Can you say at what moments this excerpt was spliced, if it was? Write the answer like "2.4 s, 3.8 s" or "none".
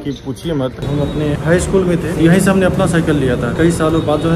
0.9 s, 2.1 s, 3.5 s